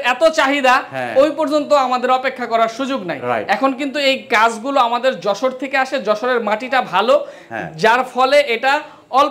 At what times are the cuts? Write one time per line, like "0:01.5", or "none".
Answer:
none